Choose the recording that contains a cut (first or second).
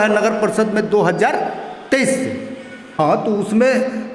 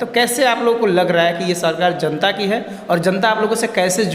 first